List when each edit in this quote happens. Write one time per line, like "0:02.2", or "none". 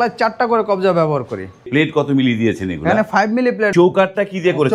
0:01.7
0:03.7

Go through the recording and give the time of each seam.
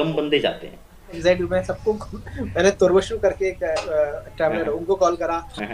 0:01.2

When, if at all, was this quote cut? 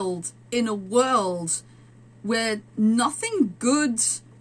none

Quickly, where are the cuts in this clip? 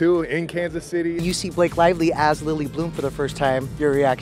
0:01.2

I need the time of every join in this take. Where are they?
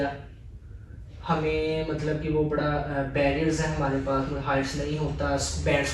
none

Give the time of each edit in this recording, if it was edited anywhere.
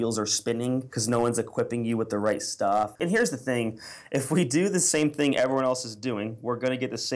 0:00.9
0:02.9

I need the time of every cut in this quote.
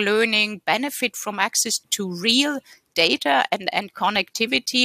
0:01.9

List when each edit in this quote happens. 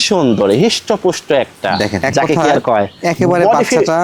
0:02.0

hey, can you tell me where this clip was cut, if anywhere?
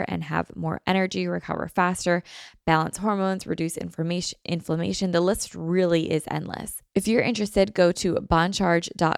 0:06.7

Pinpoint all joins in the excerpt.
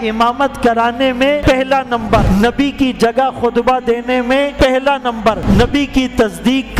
0:01.4
0:02.2
0:04.5
0:05.4

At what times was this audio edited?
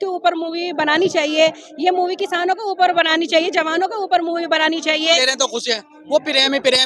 0:05.2

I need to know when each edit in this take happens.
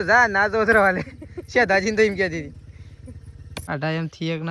0:03.5

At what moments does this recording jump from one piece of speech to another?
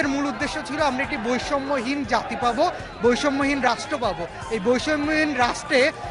none

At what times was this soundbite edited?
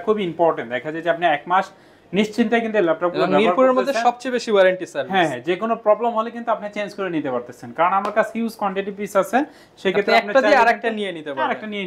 none

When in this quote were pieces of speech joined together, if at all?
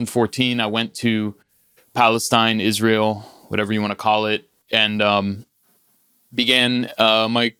none

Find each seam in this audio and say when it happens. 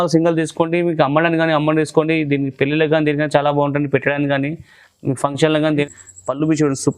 0:05.9

